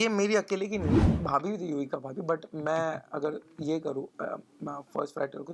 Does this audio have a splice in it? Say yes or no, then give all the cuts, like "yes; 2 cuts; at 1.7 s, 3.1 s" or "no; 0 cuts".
yes; 1 cut; at 1.1 s